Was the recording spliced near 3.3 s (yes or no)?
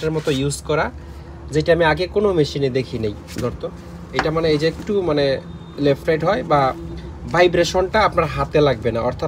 no